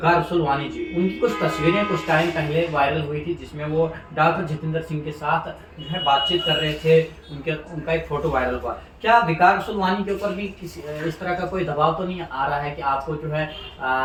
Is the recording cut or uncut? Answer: uncut